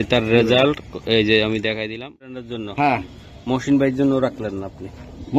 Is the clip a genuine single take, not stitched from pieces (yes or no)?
no